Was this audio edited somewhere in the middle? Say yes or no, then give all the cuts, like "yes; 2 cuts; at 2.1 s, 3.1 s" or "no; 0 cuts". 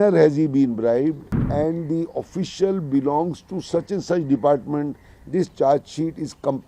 yes; 1 cut; at 1.3 s